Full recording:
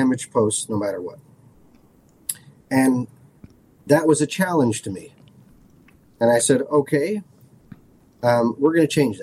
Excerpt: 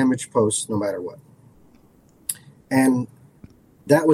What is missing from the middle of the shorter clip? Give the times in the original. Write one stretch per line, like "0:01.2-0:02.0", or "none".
none

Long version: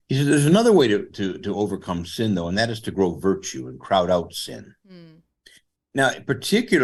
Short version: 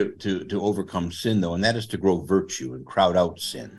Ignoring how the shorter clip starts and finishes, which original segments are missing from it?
none

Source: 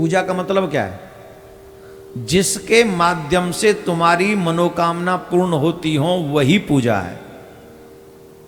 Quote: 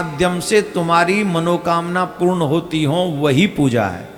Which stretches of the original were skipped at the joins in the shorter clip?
none

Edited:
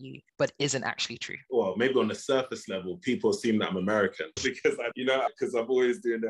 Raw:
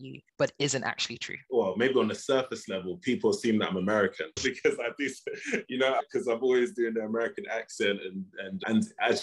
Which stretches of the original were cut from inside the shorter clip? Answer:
0:04.9-0:05.7

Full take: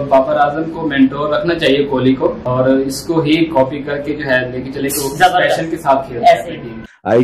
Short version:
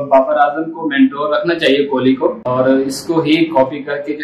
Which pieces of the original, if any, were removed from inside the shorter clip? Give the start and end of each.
none

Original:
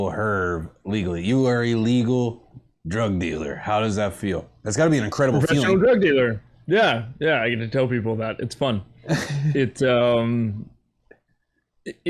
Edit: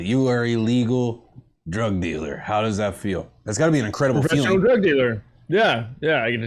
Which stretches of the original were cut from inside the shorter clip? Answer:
none

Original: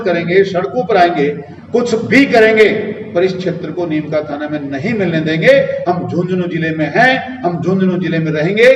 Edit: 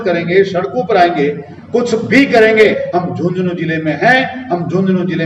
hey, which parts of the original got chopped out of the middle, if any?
0:02.7-0:05.7

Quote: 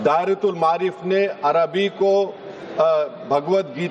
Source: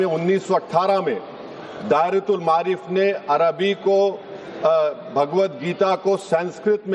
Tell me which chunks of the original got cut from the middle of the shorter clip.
none

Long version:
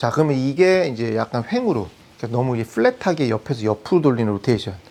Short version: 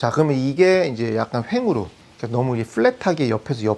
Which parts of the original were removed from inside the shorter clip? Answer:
none

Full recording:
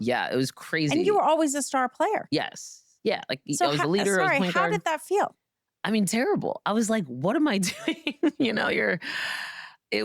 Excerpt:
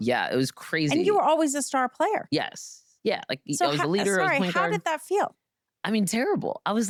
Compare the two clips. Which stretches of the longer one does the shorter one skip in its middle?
none

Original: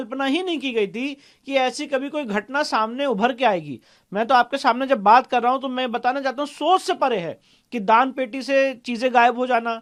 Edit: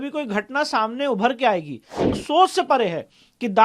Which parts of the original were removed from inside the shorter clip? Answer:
0:04.1-0:06.4

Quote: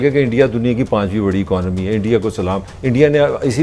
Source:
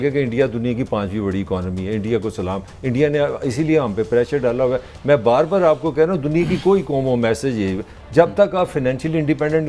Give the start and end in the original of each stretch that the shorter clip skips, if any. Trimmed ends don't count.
none

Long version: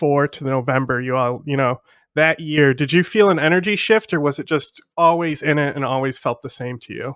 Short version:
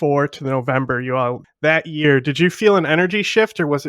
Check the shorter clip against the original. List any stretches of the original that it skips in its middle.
0:01.4-0:01.9

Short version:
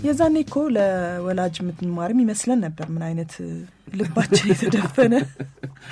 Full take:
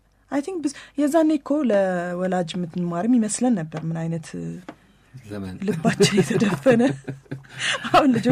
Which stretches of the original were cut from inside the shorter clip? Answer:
0:04.7-0:05.5

